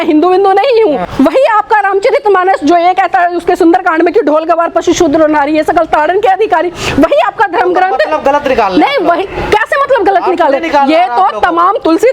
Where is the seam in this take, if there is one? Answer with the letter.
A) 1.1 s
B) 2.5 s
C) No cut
A